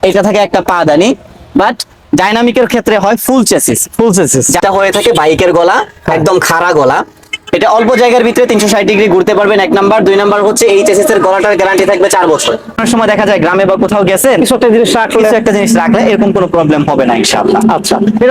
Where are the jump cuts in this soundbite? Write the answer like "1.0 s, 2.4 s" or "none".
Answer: 4.6 s, 12.8 s